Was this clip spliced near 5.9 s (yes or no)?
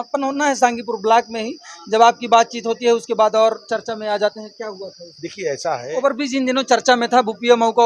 yes